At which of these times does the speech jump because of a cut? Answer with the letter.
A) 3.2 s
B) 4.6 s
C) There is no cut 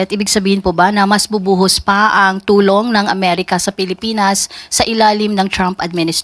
C